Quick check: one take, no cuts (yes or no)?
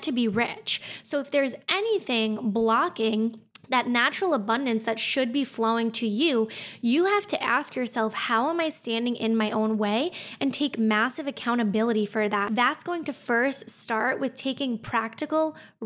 no